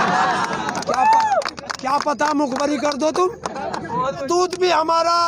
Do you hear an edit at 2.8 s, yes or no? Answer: no